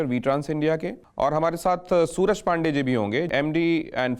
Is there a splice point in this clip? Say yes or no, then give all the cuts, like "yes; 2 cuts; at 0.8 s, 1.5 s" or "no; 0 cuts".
yes; 2 cuts; at 1.0 s, 3.3 s